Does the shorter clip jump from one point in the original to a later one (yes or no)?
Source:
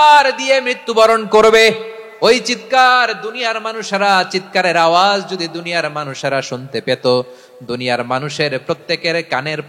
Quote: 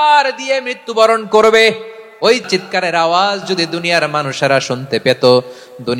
yes